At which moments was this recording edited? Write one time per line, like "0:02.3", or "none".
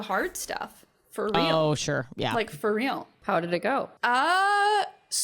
0:03.2
0:03.9